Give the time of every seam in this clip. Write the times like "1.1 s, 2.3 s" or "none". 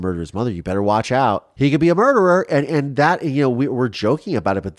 1.5 s